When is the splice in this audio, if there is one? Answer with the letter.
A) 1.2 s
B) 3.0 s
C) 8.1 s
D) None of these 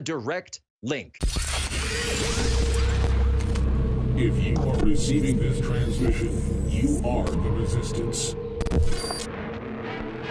A